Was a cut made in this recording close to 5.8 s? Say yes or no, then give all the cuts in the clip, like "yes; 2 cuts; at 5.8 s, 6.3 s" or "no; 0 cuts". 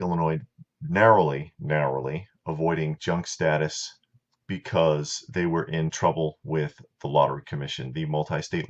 yes; 1 cut; at 5.8 s